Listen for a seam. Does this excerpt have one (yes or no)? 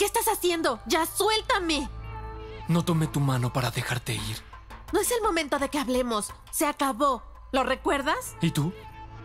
no